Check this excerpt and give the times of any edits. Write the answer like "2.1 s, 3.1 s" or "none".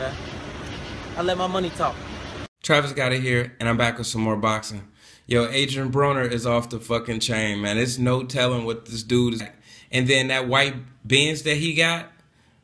none